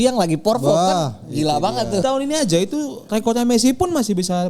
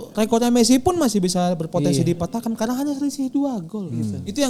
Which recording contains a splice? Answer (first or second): first